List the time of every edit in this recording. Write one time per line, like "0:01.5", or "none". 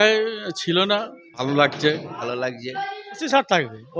0:01.4
0:02.2
0:03.2